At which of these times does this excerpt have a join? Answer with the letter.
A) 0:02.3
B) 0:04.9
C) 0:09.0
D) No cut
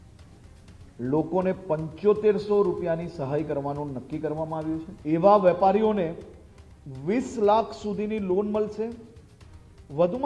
B